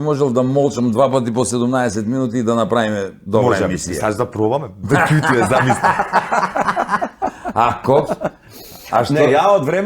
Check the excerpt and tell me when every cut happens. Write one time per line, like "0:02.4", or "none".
none